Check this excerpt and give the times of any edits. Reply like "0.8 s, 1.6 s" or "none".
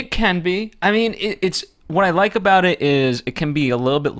1.2 s